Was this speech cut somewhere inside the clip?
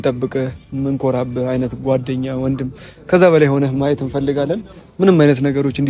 no; 0 cuts

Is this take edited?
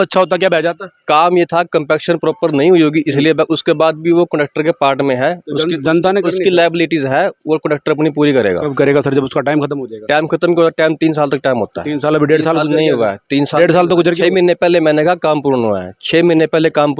no; 0 cuts

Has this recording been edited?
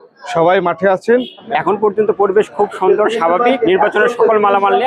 yes; 2 cuts; at 1.4 s, 3.6 s

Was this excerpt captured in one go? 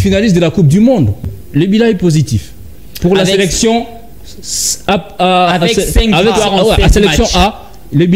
no; 1 cut; at 1.2 s

